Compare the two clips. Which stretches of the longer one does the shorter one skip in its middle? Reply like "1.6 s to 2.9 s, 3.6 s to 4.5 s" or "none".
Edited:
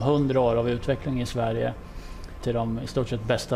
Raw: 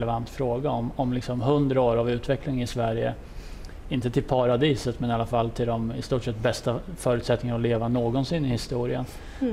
4.0 s to 5.8 s